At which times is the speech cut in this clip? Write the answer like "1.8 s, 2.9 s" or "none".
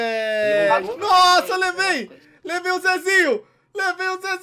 0.9 s